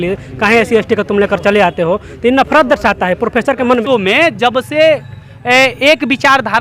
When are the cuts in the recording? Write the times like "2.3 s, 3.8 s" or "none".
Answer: 3.8 s